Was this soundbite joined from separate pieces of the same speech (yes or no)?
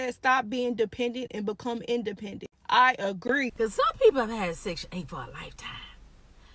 yes